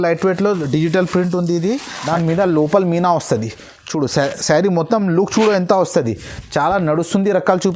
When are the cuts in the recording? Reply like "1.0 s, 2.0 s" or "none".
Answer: 1.9 s